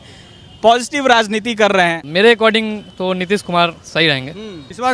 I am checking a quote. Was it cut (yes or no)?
yes